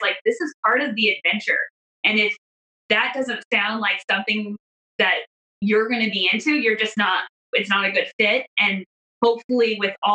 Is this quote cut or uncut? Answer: uncut